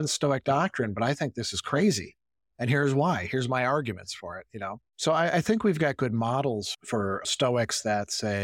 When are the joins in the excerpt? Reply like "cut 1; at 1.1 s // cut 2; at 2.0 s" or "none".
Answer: cut 1; at 6.7 s